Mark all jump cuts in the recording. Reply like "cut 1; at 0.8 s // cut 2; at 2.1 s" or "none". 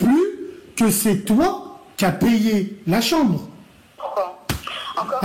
cut 1; at 4.0 s